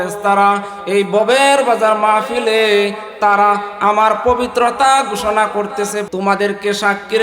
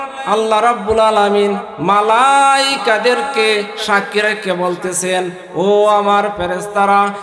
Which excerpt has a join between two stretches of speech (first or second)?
first